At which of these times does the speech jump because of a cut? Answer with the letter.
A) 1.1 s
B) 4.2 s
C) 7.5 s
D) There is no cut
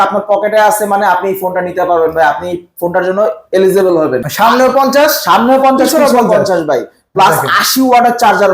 B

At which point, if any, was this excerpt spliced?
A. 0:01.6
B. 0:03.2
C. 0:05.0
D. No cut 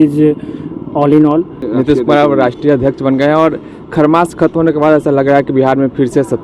A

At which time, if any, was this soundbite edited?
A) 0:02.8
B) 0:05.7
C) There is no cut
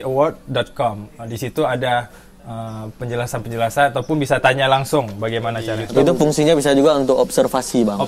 B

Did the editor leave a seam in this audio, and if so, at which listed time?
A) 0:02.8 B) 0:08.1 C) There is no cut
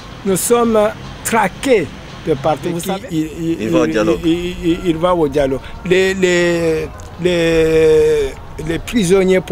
A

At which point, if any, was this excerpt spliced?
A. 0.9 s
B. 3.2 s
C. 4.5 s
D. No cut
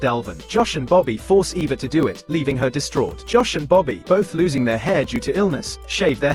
D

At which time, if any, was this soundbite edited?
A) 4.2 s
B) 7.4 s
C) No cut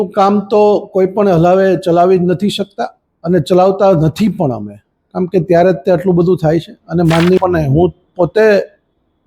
B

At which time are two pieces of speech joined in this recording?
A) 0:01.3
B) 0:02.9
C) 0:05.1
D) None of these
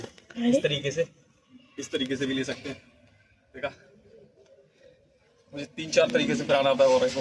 D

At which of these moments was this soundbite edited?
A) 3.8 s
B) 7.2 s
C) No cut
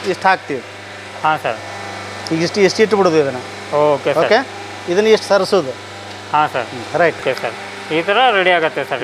B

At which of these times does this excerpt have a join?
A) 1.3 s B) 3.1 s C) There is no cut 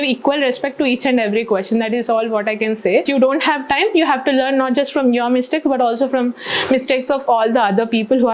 B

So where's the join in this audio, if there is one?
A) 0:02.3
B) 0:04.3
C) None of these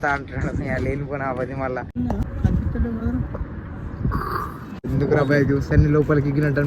A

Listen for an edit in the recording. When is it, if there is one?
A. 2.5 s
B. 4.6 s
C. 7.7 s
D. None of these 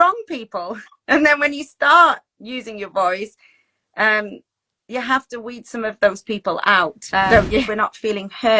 C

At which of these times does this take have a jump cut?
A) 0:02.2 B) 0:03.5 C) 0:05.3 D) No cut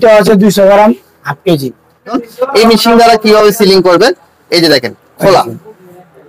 A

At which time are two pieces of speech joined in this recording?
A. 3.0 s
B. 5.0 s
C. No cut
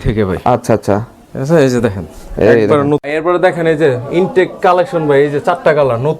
A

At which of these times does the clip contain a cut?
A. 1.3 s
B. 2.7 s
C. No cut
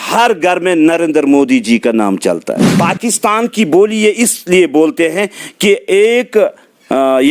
B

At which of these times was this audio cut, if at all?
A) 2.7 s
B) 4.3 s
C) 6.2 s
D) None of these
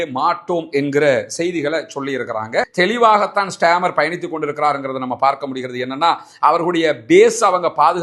A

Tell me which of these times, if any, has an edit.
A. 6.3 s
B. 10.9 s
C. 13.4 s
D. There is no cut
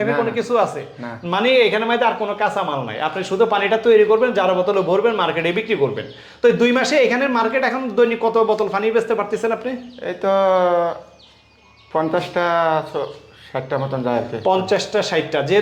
D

